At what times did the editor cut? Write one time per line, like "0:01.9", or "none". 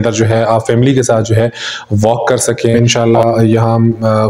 0:02.8